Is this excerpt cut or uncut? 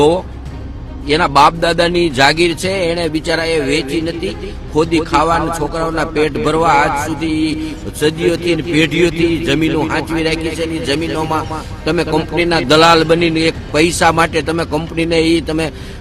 uncut